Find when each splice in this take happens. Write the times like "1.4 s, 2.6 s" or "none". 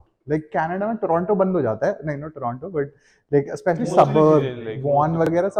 none